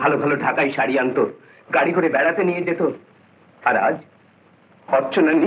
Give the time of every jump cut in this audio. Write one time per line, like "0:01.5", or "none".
none